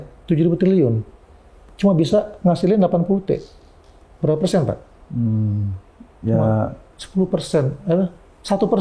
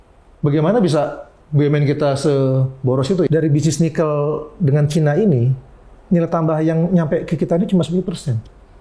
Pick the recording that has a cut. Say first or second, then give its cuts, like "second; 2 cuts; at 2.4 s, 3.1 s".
second; 1 cut; at 3.3 s